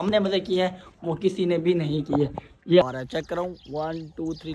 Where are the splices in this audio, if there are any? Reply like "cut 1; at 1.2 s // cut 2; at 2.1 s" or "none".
cut 1; at 2.8 s